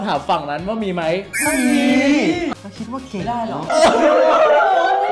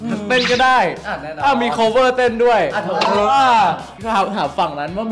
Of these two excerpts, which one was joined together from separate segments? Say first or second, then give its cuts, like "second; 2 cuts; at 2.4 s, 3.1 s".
first; 1 cut; at 2.5 s